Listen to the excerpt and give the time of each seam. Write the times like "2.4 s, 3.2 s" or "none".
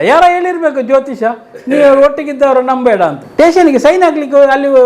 3.2 s